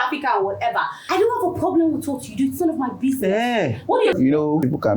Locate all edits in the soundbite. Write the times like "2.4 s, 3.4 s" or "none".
1.0 s, 4.2 s